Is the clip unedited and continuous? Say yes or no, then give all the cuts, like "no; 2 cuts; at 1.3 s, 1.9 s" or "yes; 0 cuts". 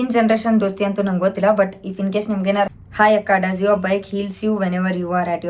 no; 1 cut; at 2.7 s